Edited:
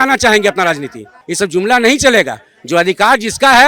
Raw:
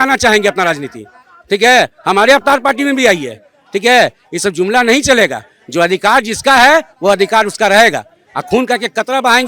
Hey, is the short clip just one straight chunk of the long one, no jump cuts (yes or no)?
no